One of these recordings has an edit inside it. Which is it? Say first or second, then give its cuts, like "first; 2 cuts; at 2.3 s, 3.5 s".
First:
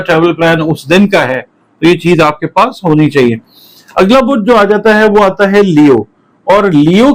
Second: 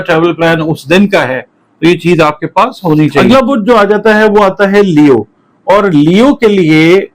second; 1 cut; at 3.2 s